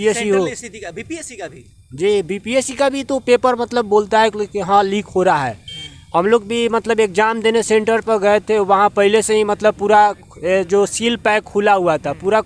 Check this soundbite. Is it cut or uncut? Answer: uncut